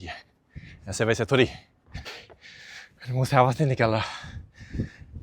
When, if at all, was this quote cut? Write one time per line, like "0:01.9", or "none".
0:02.2

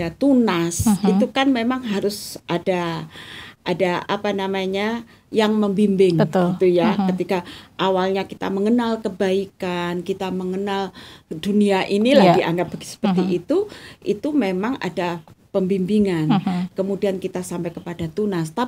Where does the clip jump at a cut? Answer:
none

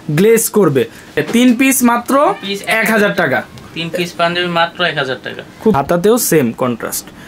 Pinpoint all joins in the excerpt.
0:01.2
0:05.8

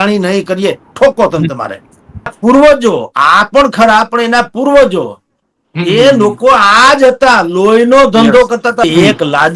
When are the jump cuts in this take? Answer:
0:02.3
0:08.8

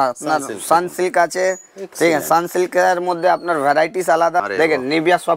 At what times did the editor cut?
0:04.4

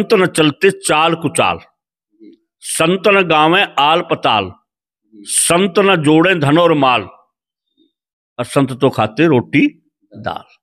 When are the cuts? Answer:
none

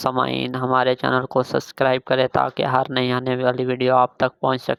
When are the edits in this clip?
none

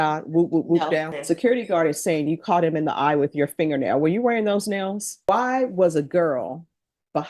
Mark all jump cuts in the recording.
0:01.1
0:05.1

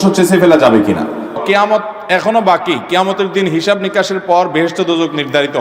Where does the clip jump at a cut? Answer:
0:01.4

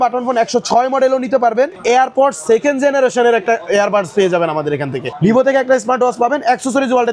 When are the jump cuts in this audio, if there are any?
0:01.8
0:05.0

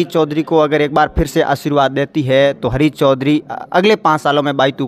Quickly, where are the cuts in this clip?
none

